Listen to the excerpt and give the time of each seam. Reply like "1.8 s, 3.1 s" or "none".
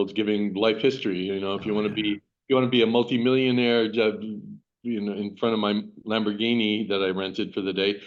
none